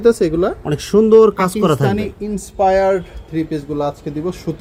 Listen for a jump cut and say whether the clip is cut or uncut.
uncut